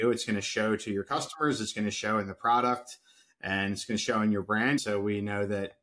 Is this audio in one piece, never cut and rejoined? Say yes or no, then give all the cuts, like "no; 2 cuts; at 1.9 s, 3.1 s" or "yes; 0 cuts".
no; 1 cut; at 4.8 s